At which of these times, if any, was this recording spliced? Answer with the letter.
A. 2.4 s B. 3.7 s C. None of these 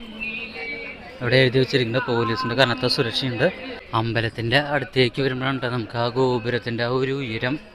B